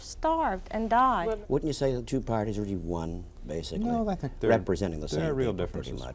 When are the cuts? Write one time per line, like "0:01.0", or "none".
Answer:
0:01.4